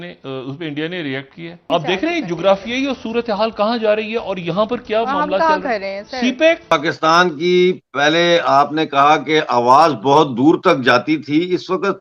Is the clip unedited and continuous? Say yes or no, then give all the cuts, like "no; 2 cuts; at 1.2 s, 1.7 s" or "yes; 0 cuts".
no; 2 cuts; at 1.7 s, 6.7 s